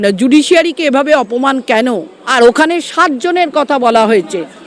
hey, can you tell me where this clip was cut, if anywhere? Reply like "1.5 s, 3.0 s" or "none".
2.2 s